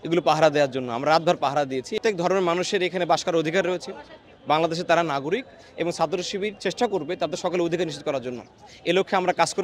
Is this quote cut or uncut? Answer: cut